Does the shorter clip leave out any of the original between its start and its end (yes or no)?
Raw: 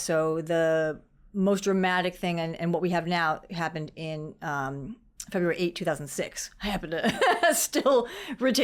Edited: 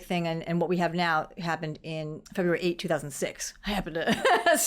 yes